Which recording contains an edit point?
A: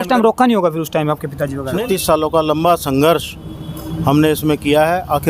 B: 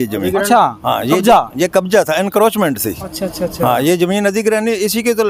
A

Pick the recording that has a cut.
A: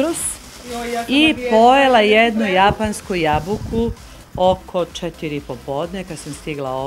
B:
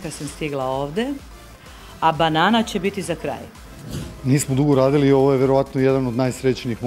B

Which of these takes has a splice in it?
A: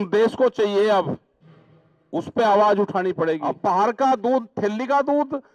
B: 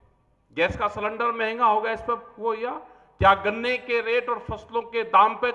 A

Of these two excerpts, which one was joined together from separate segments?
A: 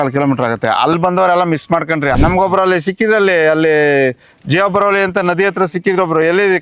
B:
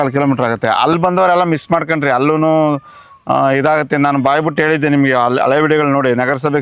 A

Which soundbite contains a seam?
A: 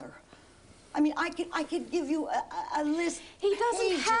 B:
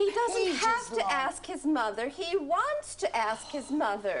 A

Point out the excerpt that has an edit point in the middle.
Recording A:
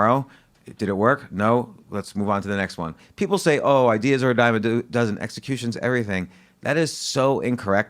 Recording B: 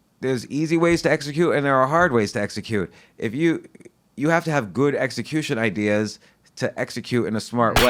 A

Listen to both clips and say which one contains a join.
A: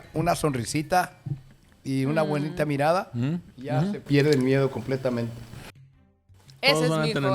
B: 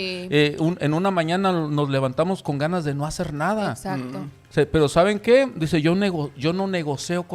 A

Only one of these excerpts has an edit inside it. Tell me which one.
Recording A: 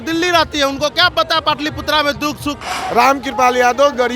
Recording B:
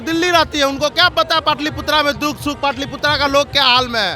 A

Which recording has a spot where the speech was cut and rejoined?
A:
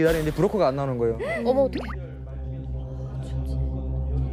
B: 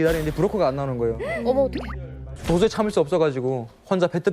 B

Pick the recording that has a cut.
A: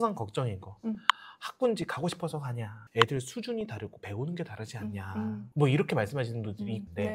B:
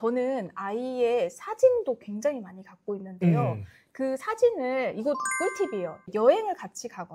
B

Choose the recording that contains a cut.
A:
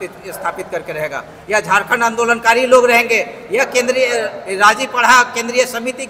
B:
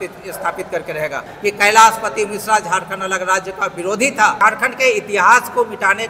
B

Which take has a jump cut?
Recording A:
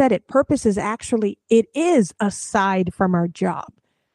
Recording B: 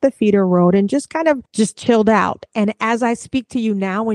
B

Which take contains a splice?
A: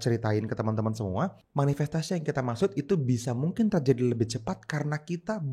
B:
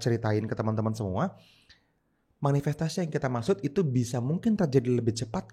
A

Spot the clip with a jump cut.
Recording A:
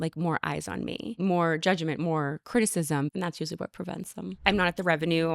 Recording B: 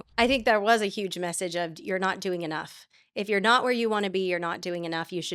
A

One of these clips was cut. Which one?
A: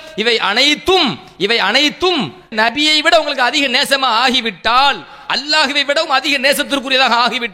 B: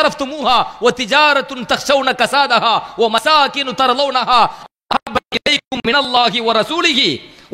A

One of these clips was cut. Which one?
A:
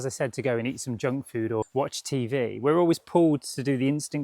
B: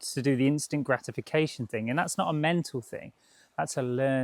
A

